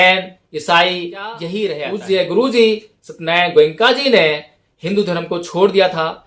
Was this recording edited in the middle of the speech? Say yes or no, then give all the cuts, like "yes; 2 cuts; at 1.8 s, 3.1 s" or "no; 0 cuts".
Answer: yes; 1 cut; at 1.8 s